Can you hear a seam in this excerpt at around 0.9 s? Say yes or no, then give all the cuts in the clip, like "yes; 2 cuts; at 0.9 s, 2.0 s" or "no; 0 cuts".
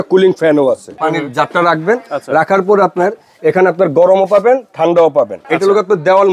yes; 2 cuts; at 0.9 s, 5.4 s